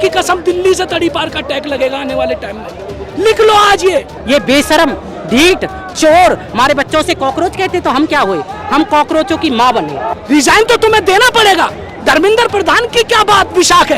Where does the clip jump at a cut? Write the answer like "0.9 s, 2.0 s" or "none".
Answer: 4.1 s, 10.1 s